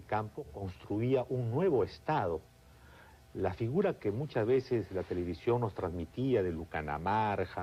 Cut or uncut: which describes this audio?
uncut